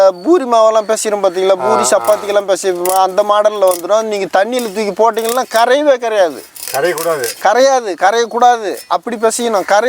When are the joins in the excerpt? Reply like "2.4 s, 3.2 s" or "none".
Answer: none